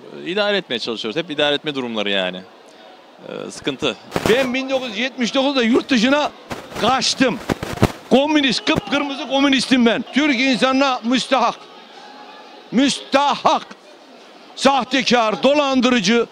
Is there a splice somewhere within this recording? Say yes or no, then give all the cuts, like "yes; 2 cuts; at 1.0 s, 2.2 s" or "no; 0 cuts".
yes; 2 cuts; at 4.0 s, 10.0 s